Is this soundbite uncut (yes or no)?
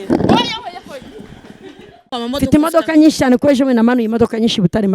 no